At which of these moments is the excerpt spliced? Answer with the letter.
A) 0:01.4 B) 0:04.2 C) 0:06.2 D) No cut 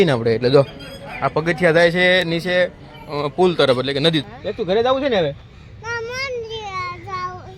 B